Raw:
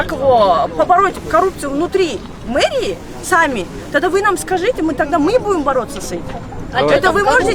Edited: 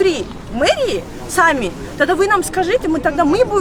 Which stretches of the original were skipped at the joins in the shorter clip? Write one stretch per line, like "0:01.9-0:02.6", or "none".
none